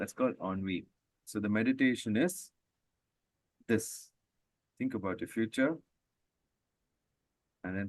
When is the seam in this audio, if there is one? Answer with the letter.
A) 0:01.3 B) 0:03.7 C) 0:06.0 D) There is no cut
A